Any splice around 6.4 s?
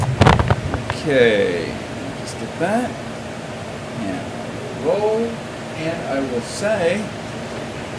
no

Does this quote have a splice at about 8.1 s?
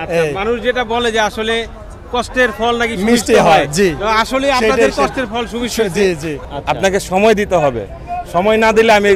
no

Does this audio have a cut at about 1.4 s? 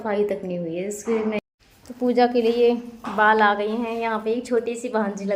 yes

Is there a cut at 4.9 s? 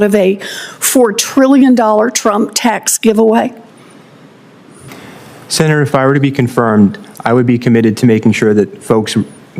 yes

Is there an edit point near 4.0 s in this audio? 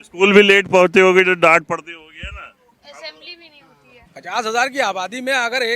yes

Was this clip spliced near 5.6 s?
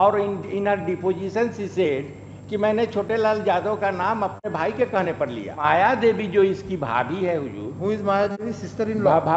yes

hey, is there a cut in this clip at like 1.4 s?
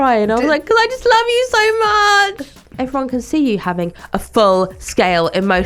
no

